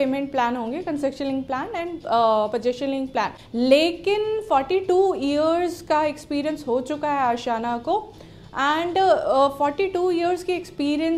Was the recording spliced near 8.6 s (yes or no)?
no